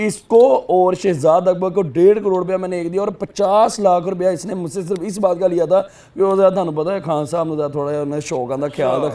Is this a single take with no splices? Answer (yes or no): yes